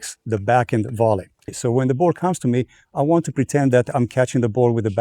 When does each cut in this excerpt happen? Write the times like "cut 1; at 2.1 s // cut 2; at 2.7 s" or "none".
cut 1; at 1.6 s